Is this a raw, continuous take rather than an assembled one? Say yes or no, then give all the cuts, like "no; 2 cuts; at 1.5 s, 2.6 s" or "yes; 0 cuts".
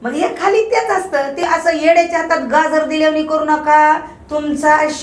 no; 1 cut; at 1.4 s